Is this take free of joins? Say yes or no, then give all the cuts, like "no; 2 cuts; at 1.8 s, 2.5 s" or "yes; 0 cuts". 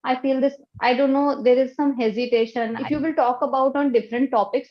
no; 1 cut; at 2.8 s